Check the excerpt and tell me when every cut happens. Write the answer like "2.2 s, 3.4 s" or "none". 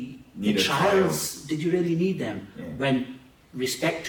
none